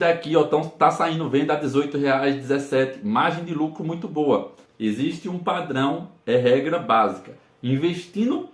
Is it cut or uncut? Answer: cut